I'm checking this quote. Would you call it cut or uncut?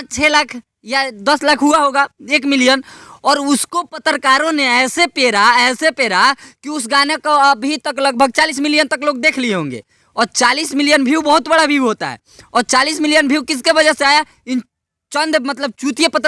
uncut